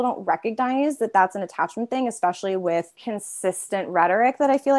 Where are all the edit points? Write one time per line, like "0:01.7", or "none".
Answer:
0:03.0